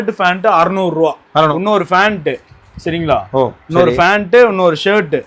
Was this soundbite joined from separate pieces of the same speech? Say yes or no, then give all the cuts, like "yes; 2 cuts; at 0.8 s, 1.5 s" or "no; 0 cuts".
yes; 1 cut; at 1.5 s